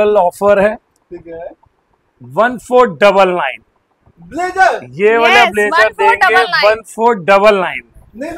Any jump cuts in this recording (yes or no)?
no